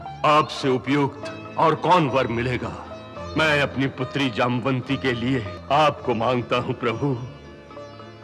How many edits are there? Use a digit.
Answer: 2